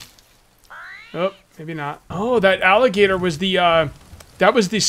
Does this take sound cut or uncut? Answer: cut